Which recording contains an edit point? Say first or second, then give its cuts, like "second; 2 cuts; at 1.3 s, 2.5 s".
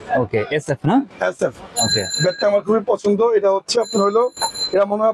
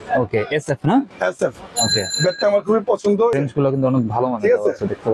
second; 1 cut; at 3.3 s